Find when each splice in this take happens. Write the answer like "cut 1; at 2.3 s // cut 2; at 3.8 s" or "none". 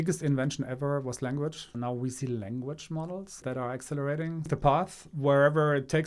cut 1; at 1.7 s // cut 2; at 3.4 s // cut 3; at 4.5 s